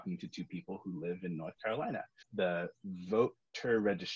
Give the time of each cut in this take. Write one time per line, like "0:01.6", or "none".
0:02.2